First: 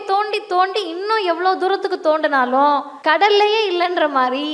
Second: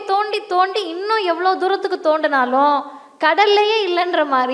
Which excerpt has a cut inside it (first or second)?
first